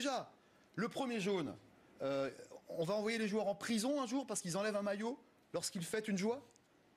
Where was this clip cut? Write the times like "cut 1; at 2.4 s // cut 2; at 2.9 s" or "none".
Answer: cut 1; at 2.4 s